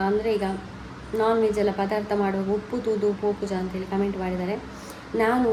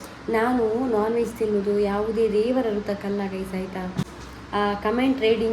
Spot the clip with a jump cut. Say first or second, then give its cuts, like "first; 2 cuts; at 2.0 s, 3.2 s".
second; 1 cut; at 4.1 s